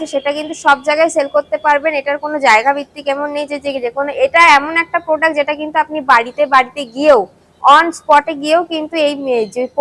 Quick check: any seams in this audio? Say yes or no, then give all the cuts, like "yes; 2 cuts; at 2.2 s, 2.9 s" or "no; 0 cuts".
no; 0 cuts